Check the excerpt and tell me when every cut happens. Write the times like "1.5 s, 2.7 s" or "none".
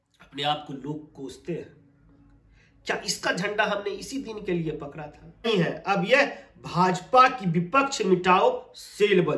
5.5 s